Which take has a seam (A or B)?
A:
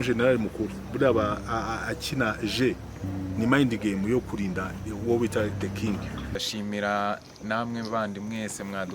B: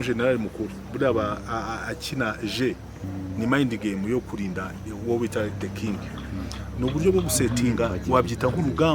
A